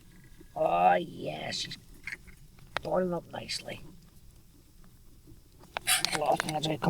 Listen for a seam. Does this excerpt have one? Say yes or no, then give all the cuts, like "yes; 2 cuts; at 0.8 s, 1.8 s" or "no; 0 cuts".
yes; 1 cut; at 5.6 s